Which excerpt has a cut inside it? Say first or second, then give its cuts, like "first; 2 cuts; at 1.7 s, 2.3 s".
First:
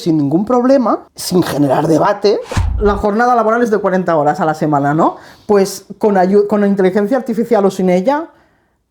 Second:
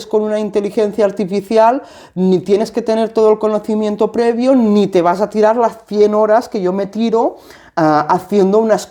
first; 2 cuts; at 1.1 s, 2.6 s